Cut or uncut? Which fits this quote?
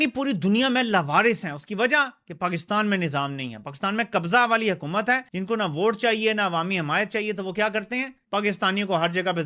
uncut